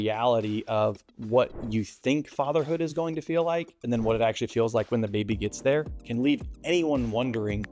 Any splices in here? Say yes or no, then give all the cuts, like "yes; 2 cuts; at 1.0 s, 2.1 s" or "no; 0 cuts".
no; 0 cuts